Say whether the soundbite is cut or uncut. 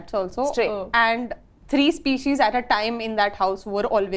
uncut